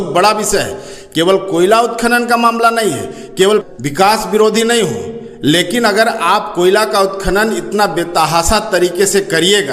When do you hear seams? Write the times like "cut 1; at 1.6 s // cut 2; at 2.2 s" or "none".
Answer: cut 1; at 3.7 s